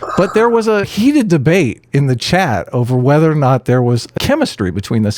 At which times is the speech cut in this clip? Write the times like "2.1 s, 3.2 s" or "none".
0.9 s, 4.1 s